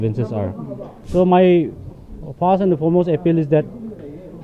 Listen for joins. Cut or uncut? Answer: cut